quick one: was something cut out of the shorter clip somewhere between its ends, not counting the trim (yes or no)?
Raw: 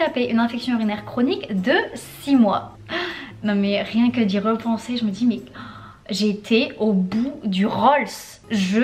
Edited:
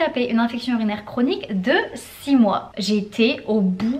yes